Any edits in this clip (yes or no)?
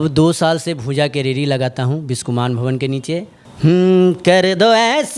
yes